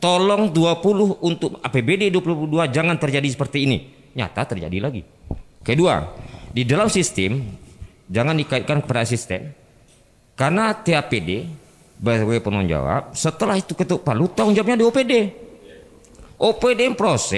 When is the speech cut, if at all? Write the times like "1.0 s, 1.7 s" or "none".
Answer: none